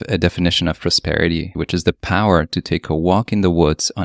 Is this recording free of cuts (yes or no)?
no